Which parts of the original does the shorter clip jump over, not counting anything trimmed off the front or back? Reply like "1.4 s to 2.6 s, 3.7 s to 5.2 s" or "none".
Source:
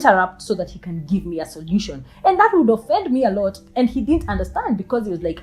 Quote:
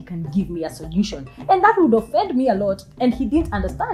none

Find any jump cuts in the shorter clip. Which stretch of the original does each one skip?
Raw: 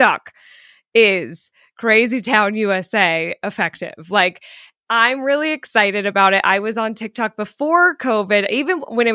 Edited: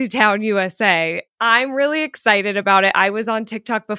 3.4 s to 4.7 s

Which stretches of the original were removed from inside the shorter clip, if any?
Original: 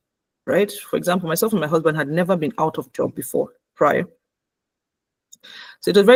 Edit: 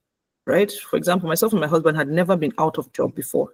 none

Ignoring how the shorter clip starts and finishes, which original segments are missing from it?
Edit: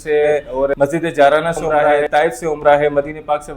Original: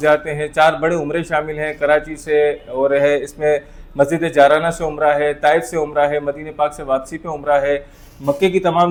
2.9 s to 3.9 s, 5.2 s to 5.3 s

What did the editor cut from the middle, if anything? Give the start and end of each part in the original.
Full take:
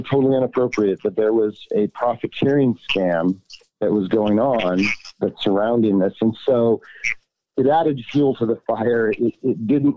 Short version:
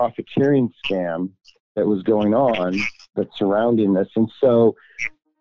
none

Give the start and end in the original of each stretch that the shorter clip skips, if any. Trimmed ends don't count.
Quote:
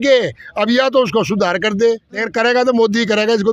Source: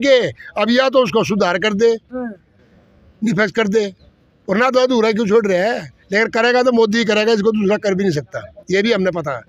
2.1 s to 6.1 s

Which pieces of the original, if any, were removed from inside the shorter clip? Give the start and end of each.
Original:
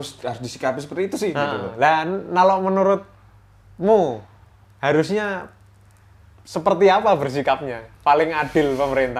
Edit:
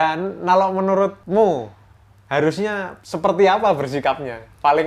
3.1 s to 3.7 s, 5.5 s to 6.4 s

